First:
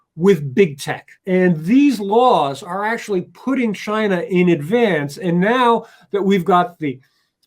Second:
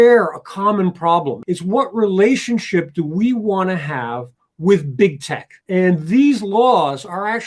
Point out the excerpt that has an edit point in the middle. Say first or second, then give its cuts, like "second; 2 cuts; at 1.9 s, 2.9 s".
second; 1 cut; at 1.4 s